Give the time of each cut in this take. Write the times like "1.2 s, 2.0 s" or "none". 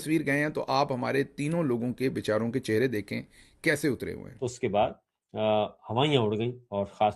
none